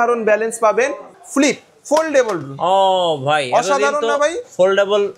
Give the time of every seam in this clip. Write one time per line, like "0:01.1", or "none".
0:01.1